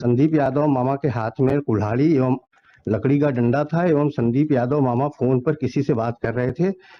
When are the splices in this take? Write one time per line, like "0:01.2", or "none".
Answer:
none